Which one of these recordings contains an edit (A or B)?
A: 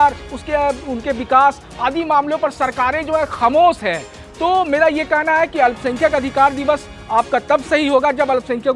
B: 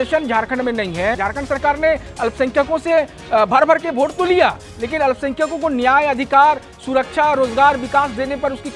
B